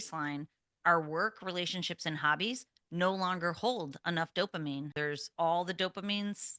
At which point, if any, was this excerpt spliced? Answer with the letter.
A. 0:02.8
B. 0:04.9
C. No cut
B